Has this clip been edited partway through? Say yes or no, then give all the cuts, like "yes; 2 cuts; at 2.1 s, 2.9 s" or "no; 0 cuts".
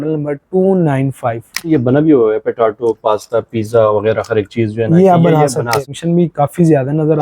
yes; 2 cuts; at 1.7 s, 5.9 s